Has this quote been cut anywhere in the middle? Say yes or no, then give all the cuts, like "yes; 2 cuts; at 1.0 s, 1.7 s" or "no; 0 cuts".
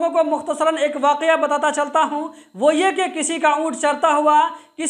no; 0 cuts